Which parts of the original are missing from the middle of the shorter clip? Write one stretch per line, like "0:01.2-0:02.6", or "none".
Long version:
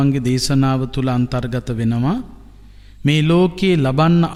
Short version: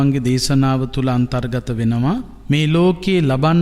0:02.3-0:02.9